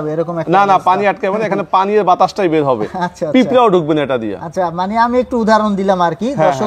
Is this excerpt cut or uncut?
uncut